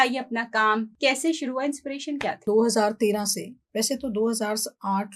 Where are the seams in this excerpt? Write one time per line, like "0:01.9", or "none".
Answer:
0:00.9
0:02.4